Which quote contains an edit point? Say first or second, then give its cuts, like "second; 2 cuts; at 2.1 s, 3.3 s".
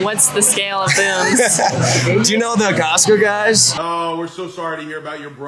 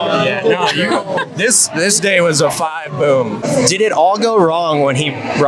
second; 1 cut; at 3.4 s